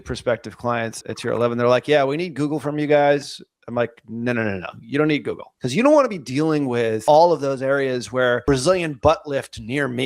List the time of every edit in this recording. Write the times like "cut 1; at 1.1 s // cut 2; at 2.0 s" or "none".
cut 1; at 1.0 s // cut 2; at 5.5 s // cut 3; at 7.0 s // cut 4; at 8.4 s